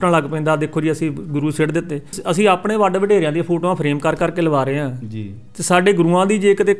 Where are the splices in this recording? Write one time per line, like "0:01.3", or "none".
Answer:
0:02.2